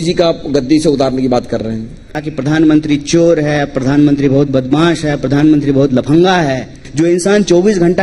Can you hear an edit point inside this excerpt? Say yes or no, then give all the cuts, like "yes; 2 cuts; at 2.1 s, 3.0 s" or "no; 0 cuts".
yes; 2 cuts; at 2.2 s, 6.8 s